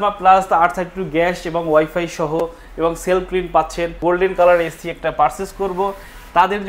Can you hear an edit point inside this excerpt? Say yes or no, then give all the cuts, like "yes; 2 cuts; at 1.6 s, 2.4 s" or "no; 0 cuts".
yes; 1 cut; at 4.0 s